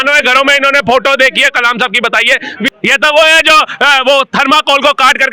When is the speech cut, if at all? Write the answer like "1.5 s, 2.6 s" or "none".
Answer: 2.7 s

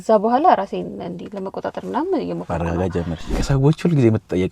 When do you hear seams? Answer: 3.3 s

